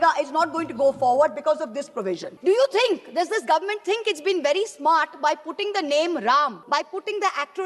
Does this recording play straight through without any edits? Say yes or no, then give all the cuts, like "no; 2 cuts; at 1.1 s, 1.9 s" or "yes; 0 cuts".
no; 2 cuts; at 2.3 s, 6.6 s